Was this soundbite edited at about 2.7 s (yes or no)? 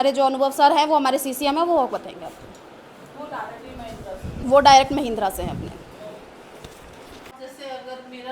no